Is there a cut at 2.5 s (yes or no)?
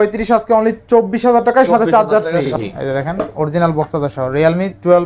yes